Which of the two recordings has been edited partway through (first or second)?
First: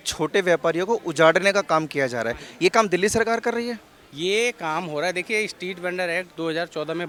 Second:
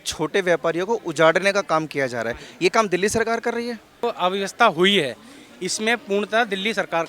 second